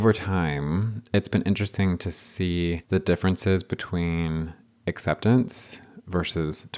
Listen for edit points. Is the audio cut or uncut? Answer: cut